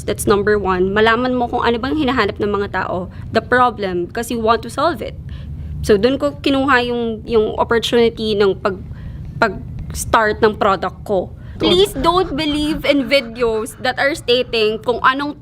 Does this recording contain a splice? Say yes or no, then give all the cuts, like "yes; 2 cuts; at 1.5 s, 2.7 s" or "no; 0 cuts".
yes; 1 cut; at 11.5 s